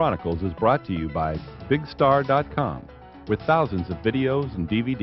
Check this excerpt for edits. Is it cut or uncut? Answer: uncut